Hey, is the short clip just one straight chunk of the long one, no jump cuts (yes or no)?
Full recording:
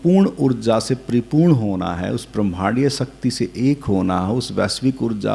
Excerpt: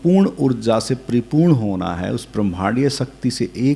yes